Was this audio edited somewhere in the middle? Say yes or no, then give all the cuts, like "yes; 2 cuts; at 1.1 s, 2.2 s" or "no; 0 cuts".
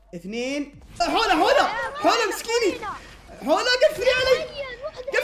yes; 1 cut; at 1.0 s